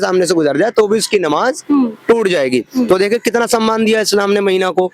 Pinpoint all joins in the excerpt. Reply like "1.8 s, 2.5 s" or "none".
none